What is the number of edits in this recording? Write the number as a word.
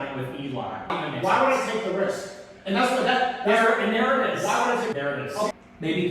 two